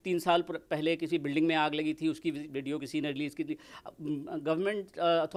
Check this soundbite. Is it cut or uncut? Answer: uncut